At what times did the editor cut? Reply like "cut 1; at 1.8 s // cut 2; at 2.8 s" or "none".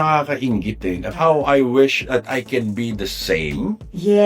cut 1; at 1.1 s